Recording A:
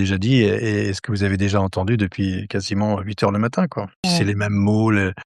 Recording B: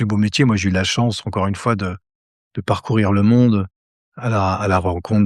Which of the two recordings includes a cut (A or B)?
A